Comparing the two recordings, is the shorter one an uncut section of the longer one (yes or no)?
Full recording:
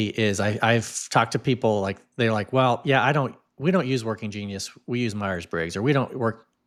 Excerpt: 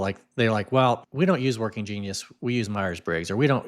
no